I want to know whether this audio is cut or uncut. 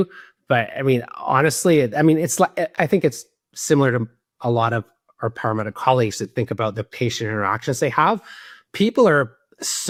uncut